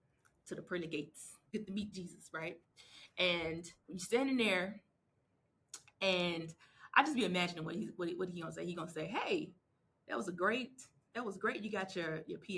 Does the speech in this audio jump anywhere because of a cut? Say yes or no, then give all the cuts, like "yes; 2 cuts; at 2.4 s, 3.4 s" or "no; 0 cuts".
yes; 1 cut; at 1.5 s